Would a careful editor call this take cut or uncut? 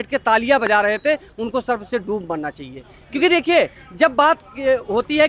uncut